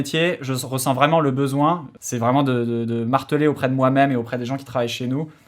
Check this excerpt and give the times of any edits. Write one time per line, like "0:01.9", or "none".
0:01.9